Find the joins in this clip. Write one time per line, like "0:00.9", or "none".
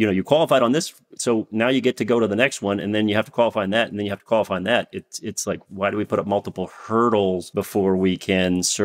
0:07.5